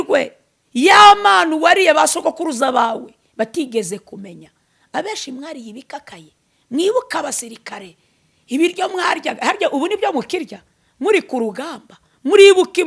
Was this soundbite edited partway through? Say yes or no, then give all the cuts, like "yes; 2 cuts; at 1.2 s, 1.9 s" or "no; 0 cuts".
no; 0 cuts